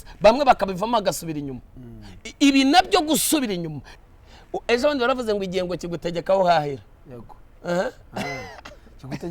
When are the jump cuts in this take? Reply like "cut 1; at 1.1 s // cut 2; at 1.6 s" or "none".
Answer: cut 1; at 3.9 s